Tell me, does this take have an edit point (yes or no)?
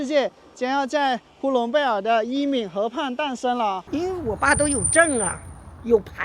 yes